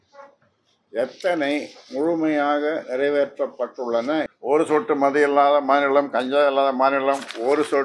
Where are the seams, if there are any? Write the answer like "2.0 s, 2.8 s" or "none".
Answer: 4.3 s